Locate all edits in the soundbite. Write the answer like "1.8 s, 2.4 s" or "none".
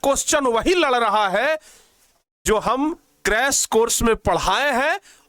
none

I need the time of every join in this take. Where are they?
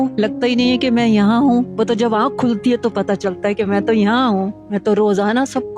1.7 s, 4.6 s

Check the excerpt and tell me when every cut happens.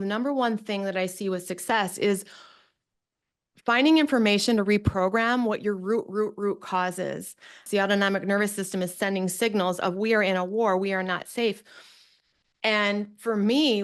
7.6 s

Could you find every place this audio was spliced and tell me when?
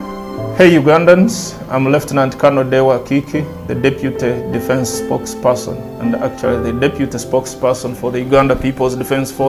none

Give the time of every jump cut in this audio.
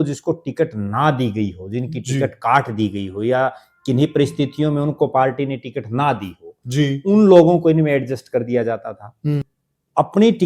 9.5 s

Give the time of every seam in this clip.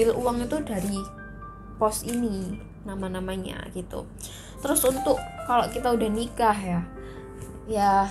none

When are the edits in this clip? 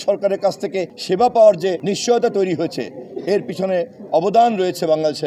0.9 s, 1.8 s

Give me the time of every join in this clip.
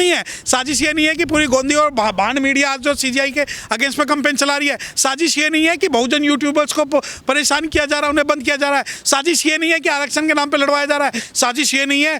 9.0 s

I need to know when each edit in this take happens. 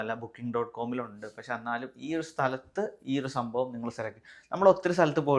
none

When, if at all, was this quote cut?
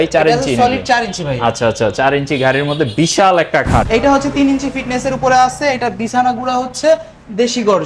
3.9 s

